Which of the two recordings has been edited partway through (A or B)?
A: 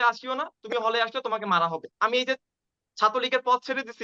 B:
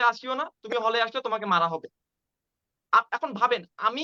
A